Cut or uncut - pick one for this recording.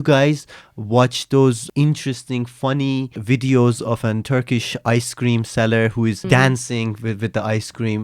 cut